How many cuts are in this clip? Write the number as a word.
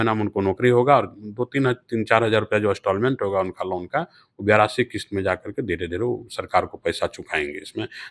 zero